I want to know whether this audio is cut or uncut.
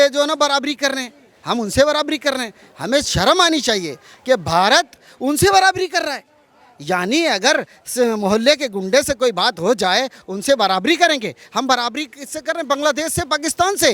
uncut